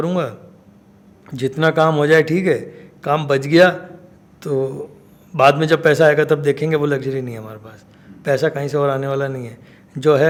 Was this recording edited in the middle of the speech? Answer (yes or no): no